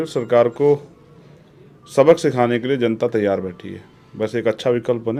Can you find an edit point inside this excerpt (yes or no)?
no